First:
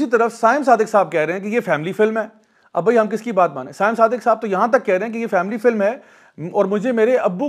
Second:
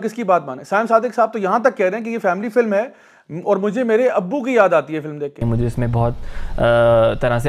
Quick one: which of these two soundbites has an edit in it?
second; 1 cut; at 5.4 s

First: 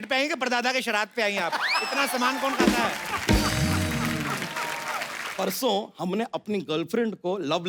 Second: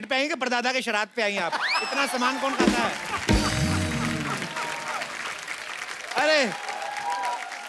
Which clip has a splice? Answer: first; 1 cut; at 5.2 s

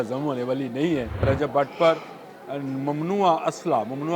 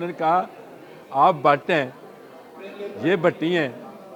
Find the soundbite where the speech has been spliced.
first; 1 cut; at 1.2 s

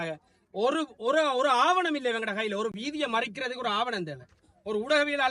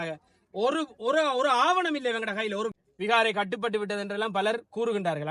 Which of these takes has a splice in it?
second; 1 cut; at 2.8 s

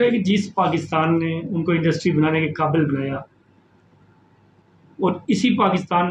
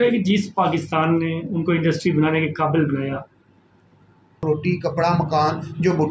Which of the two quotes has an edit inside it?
second; 1 cut; at 4.4 s

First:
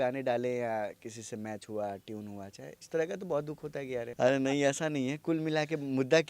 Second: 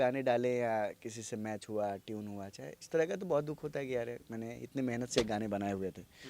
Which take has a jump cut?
first; 1 cut; at 4.1 s

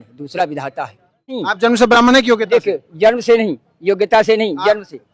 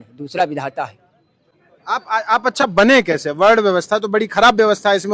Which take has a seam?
first; 1 cut; at 1.5 s

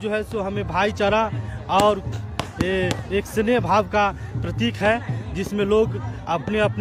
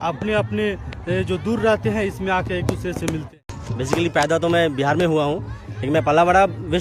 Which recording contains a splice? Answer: second; 1 cut; at 3.2 s

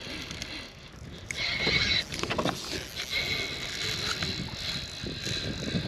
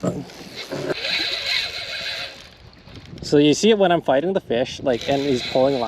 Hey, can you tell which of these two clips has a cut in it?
second; 1 cut; at 0.9 s

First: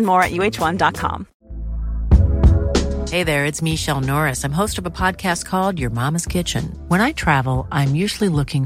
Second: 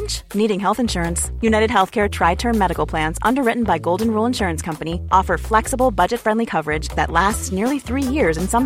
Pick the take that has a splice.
first; 1 cut; at 1.3 s

